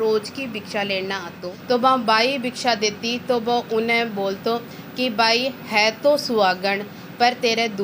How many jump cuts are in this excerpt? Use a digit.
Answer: 1